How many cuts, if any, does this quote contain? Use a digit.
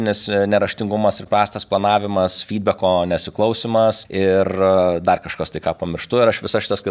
1